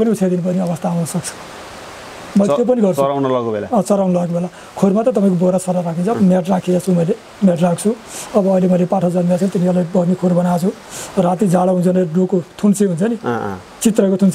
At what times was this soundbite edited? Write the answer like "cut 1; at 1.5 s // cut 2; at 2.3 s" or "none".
none